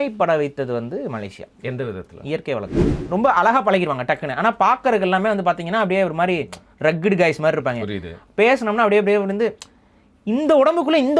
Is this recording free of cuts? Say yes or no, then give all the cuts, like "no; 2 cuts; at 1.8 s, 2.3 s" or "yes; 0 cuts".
no; 1 cut; at 2.9 s